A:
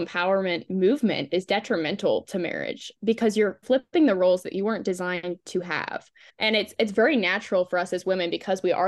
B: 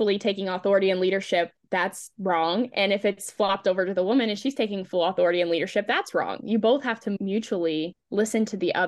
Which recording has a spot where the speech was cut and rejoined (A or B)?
A